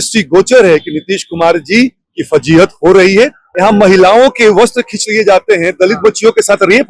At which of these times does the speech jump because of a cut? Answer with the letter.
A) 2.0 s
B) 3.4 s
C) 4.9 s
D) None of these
B